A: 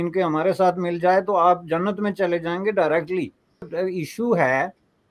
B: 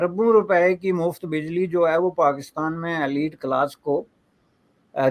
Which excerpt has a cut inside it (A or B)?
A